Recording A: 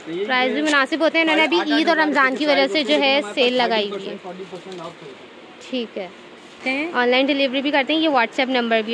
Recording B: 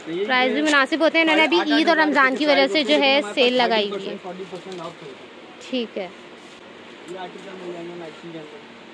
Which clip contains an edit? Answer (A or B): A